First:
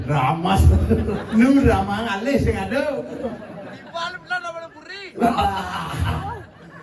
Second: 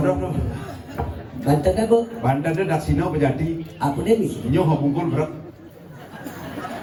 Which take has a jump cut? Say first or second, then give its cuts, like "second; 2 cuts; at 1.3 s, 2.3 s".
first; 1 cut; at 1.2 s